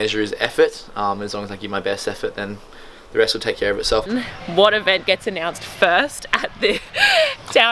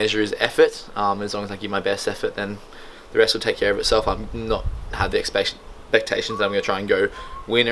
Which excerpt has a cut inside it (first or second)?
first